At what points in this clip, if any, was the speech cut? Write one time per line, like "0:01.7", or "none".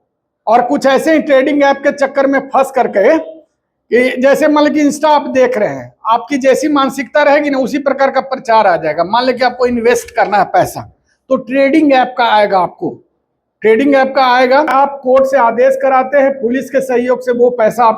0:14.7